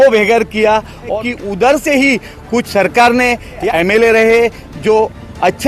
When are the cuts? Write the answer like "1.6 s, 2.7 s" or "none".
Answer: 1.2 s, 3.6 s, 4.7 s